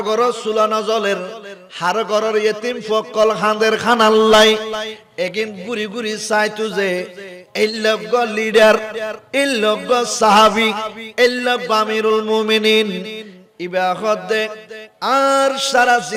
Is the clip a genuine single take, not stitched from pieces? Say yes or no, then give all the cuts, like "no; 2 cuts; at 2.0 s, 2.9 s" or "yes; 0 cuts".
yes; 0 cuts